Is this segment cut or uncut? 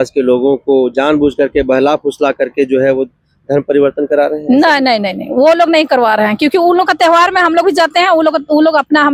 uncut